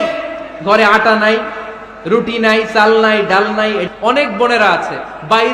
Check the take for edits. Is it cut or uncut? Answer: cut